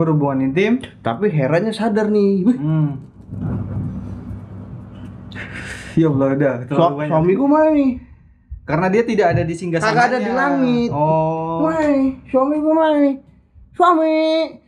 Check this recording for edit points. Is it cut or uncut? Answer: uncut